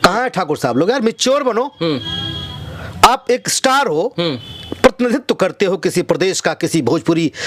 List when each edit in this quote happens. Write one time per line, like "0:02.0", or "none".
none